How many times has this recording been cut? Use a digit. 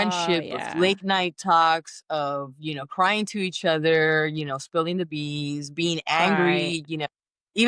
0